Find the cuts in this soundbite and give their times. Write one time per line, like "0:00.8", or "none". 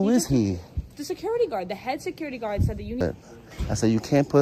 0:03.0